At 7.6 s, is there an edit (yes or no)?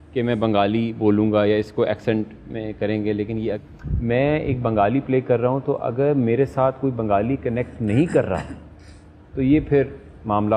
no